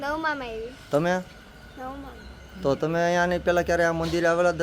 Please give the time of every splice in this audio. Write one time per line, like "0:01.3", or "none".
none